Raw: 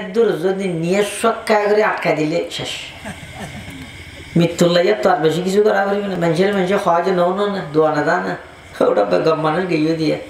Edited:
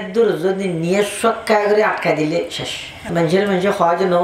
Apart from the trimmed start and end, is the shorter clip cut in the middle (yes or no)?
yes